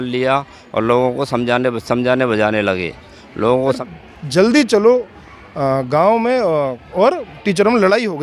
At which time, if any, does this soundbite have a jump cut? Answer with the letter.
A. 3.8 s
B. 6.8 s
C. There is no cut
A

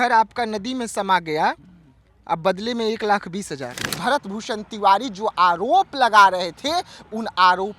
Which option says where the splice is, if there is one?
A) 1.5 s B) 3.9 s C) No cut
B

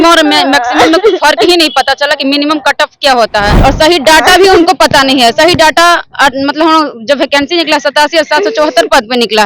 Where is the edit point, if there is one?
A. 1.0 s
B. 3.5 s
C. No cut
B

